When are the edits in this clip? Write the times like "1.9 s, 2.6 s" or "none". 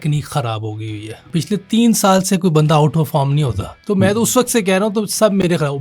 1.2 s, 3.7 s